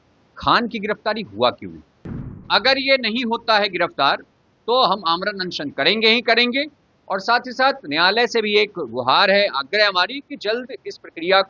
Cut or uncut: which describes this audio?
cut